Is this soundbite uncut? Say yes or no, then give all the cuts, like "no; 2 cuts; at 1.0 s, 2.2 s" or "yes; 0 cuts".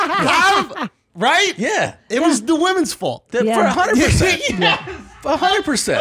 yes; 0 cuts